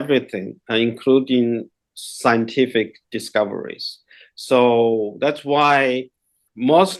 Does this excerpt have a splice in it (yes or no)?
no